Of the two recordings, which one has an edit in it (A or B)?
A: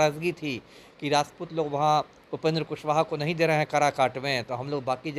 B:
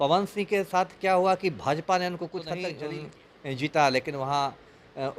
B